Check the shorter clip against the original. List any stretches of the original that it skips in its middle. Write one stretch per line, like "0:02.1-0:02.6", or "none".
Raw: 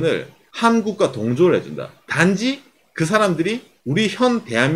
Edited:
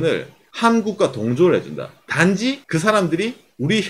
0:02.6-0:02.9